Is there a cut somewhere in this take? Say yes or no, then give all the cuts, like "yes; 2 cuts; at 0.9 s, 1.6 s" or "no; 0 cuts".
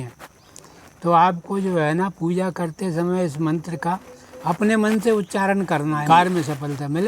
yes; 1 cut; at 6.0 s